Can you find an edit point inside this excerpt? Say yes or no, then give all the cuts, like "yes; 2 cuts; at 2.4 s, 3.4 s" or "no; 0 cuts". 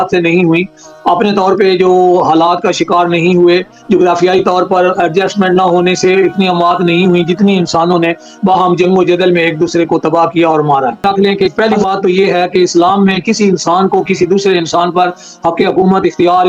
yes; 1 cut; at 11.3 s